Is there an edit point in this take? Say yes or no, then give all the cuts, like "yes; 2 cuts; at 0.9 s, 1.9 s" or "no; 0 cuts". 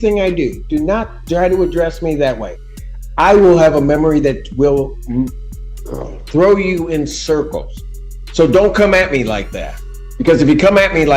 no; 0 cuts